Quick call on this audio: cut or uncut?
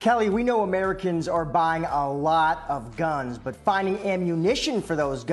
uncut